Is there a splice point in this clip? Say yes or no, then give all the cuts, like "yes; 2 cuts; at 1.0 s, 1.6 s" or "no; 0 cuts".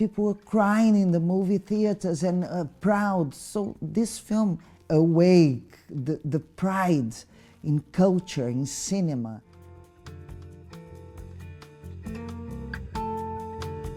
no; 0 cuts